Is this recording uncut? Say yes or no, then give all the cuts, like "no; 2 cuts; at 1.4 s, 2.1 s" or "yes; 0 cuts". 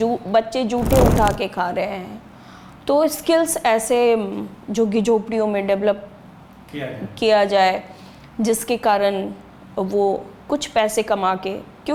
yes; 0 cuts